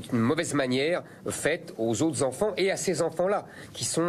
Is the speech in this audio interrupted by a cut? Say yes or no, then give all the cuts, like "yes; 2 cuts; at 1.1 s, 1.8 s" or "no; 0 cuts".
no; 0 cuts